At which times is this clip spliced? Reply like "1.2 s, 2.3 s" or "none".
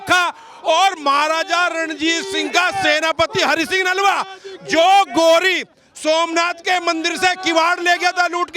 none